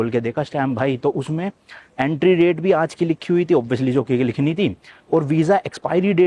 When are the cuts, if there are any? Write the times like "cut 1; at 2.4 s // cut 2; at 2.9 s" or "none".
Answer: none

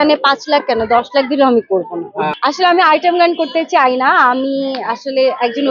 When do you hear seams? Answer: cut 1; at 2.4 s

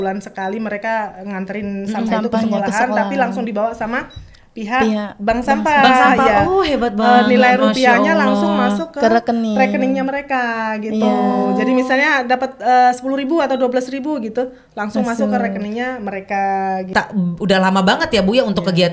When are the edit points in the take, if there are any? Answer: cut 1; at 16.9 s

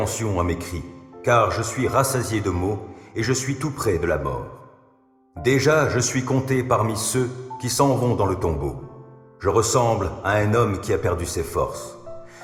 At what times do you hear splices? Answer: none

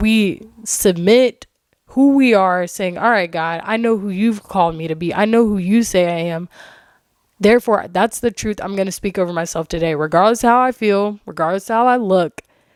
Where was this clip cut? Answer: none

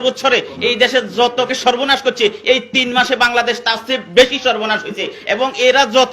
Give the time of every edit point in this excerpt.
cut 1; at 1.5 s

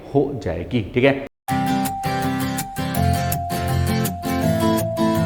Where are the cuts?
cut 1; at 1.3 s

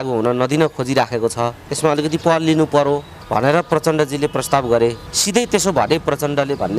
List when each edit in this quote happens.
cut 1; at 1.6 s // cut 2; at 3.1 s // cut 3; at 5.1 s

